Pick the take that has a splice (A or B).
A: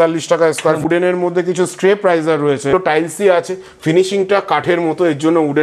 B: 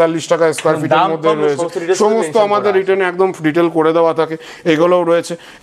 A